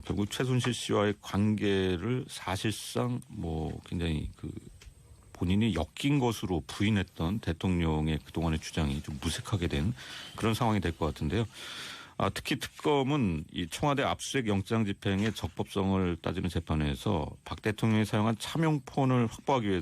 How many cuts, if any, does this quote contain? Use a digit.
1